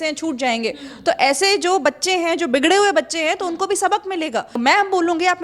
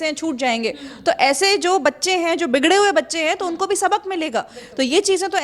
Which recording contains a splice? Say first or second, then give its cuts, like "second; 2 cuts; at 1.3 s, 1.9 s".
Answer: first; 1 cut; at 4.5 s